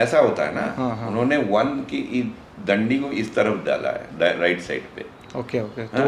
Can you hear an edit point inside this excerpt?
no; 0 cuts

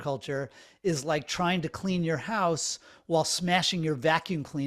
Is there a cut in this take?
no; 0 cuts

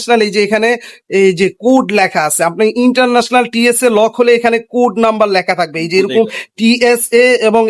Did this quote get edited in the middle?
no; 0 cuts

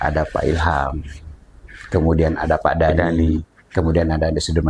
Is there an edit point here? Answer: no; 0 cuts

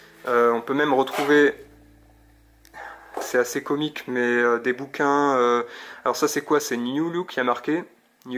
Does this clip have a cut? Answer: no; 0 cuts

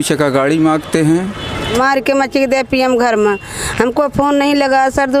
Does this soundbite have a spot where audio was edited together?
yes; 1 cut; at 1.7 s

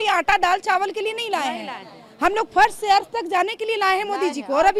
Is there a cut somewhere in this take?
no; 0 cuts

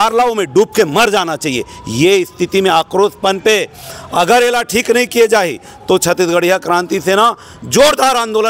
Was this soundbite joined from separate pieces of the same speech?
no; 0 cuts

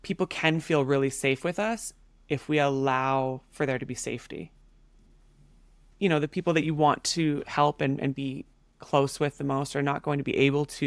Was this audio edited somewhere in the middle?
yes; 1 cut; at 5.8 s

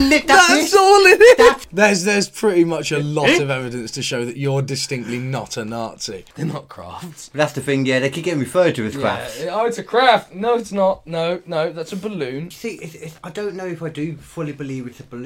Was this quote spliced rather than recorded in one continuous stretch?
yes; 3 cuts; at 1.6 s, 6.3 s, 12.5 s

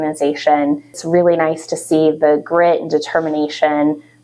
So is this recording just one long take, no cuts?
no; 1 cut; at 1.0 s

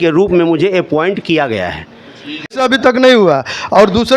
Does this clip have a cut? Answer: yes; 1 cut; at 2.5 s

